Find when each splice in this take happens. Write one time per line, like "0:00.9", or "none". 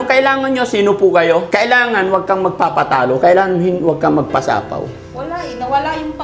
0:01.5

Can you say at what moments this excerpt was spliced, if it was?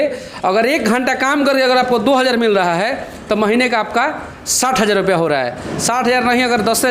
none

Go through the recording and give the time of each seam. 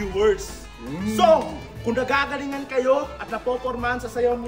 none

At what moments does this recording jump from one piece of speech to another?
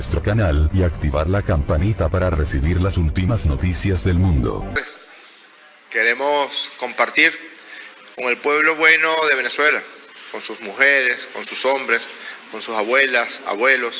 0:04.6

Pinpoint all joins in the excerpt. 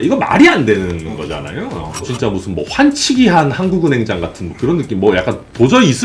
0:02.1

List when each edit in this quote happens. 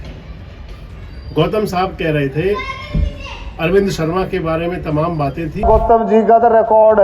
0:05.6

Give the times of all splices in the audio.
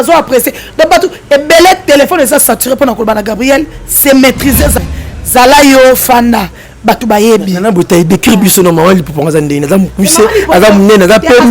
0:04.8

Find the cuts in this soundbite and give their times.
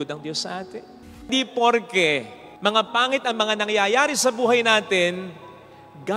0:01.2

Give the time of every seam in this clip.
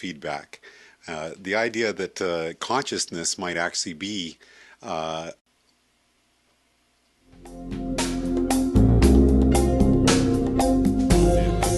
none

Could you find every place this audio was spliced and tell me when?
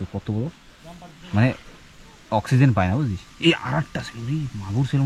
none

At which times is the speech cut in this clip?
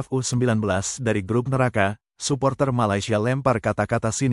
none

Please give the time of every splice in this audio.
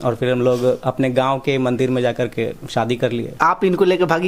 0:03.3

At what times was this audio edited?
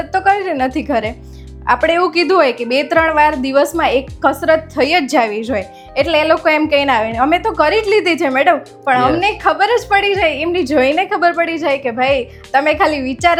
none

